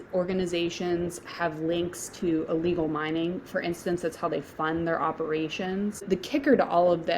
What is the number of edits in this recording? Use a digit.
1